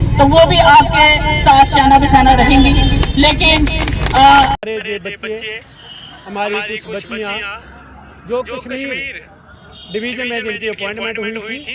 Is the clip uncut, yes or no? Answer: no